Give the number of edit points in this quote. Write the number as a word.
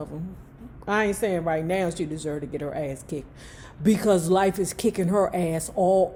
zero